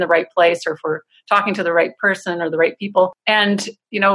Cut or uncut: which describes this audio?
cut